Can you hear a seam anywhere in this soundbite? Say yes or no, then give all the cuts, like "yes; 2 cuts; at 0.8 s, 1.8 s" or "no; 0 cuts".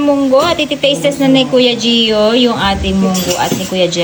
no; 0 cuts